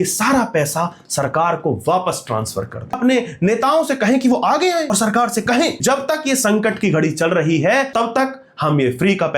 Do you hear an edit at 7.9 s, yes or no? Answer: yes